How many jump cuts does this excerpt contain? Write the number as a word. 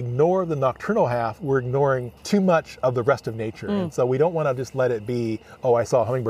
one